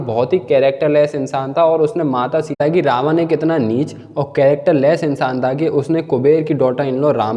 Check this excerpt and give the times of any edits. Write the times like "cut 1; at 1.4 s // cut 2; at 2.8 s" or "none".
cut 1; at 2.6 s